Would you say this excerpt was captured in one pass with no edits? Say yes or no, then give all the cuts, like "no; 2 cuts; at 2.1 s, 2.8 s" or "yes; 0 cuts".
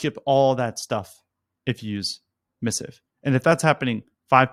yes; 0 cuts